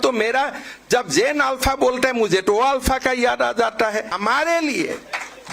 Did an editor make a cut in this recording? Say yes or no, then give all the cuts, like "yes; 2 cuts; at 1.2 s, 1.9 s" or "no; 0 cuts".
yes; 1 cut; at 4.1 s